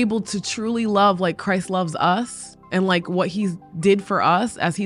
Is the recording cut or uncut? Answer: uncut